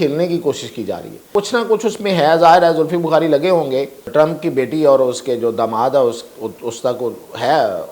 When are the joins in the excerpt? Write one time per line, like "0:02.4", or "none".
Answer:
0:01.2
0:04.0